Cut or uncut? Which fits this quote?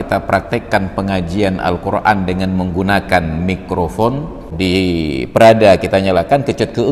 cut